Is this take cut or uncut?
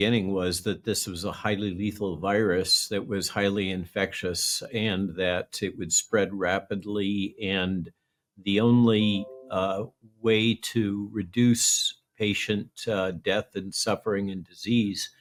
uncut